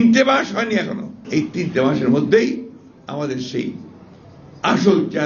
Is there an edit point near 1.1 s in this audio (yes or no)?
yes